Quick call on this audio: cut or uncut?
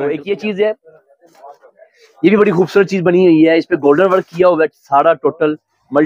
uncut